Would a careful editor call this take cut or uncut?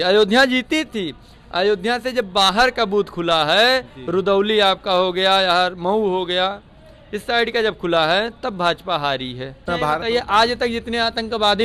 cut